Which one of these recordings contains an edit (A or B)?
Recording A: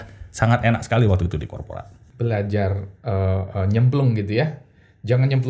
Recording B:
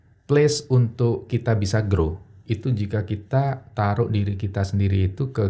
A